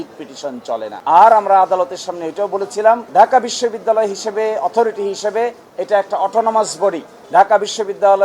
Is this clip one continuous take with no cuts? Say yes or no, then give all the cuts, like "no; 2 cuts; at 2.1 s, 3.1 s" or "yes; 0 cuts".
yes; 0 cuts